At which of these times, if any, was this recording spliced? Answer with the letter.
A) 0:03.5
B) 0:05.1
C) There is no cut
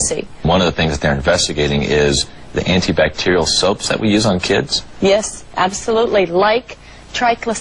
A